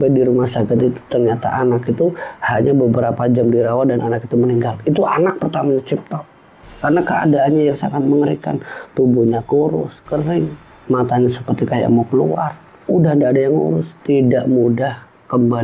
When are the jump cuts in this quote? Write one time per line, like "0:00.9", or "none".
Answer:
0:06.7
0:13.9